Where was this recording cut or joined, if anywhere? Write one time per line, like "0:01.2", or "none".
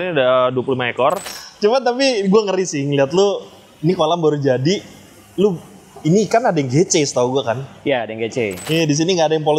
0:01.2
0:08.6